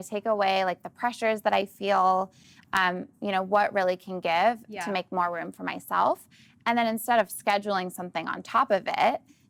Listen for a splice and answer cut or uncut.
uncut